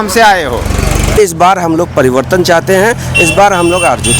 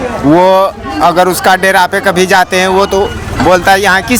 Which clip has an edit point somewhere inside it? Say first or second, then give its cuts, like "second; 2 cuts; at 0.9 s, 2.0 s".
first; 1 cut; at 1.5 s